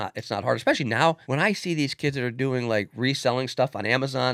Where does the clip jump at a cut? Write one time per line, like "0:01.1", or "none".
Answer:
0:01.2